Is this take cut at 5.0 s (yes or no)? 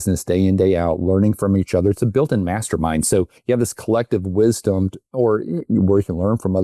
no